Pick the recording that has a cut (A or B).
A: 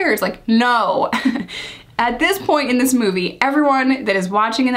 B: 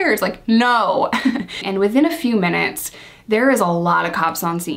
B